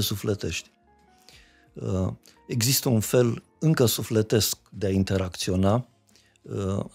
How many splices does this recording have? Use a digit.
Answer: 0